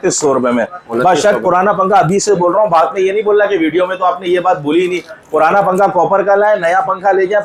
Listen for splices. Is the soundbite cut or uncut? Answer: uncut